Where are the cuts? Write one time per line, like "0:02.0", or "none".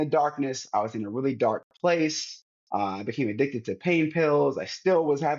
none